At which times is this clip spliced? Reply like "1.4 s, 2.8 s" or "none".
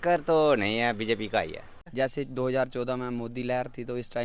1.8 s